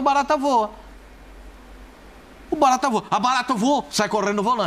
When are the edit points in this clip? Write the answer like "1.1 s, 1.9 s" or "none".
none